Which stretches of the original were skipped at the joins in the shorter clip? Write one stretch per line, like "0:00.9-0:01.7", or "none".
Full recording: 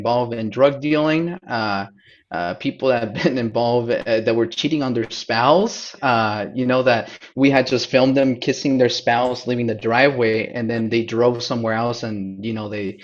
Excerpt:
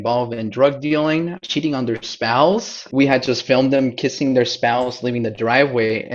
0:01.5-0:04.5
0:05.8-0:07.2